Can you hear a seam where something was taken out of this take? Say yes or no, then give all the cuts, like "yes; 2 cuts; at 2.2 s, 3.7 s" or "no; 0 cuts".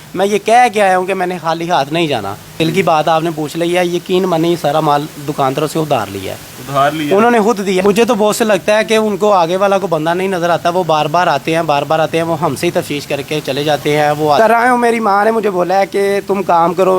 yes; 3 cuts; at 2.6 s, 7.8 s, 14.4 s